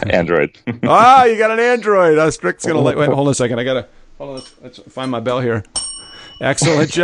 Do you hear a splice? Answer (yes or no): no